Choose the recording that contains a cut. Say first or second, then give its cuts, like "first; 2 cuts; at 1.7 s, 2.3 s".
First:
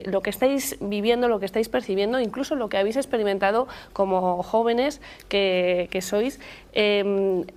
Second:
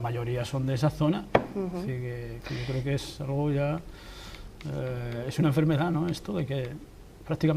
second; 1 cut; at 6.2 s